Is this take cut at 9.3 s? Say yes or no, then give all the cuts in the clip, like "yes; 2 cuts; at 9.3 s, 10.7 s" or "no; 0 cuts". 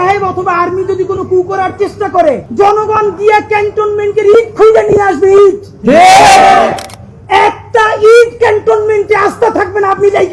no; 1 cut; at 2.5 s